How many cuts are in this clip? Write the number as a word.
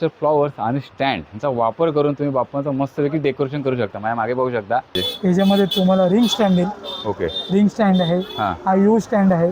one